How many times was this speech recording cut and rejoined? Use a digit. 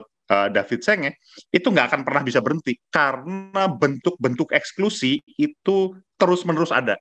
1